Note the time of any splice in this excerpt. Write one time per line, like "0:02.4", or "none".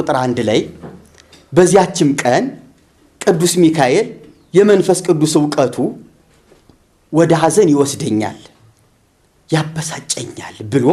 none